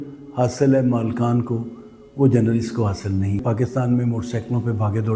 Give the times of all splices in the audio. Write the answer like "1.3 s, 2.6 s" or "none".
3.4 s